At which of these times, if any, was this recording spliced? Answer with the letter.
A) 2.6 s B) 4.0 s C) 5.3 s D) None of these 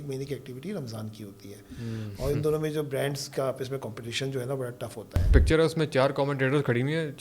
C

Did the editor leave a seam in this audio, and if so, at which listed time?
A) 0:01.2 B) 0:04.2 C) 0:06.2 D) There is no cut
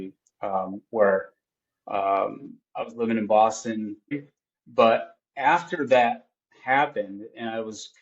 B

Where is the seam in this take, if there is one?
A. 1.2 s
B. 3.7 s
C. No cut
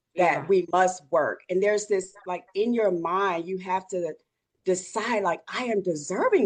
C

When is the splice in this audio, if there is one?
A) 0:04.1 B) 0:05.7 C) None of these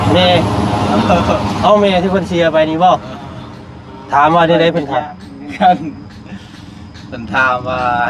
C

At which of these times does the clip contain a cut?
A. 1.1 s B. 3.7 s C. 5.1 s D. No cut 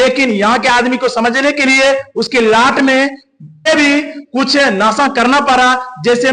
B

